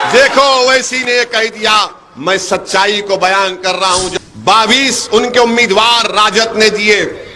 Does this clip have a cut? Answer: yes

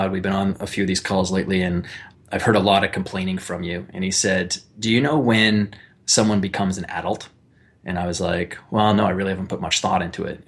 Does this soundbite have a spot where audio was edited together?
no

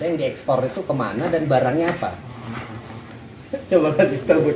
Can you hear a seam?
no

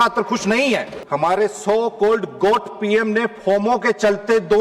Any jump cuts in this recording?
yes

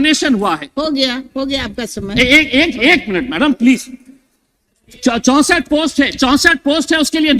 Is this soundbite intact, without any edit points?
yes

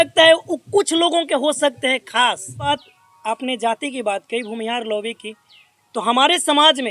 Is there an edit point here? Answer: yes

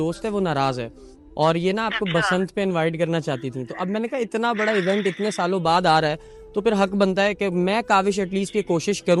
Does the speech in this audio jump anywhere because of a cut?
no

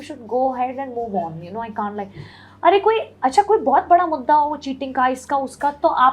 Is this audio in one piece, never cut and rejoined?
yes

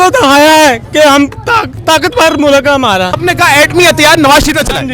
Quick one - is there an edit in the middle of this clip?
yes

